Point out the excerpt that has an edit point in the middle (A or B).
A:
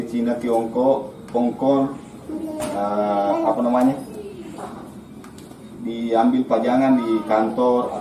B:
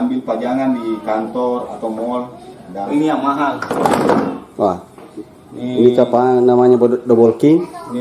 B